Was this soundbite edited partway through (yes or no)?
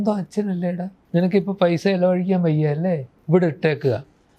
yes